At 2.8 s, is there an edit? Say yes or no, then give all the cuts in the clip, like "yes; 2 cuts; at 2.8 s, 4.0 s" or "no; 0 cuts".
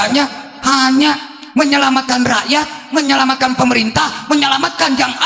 no; 0 cuts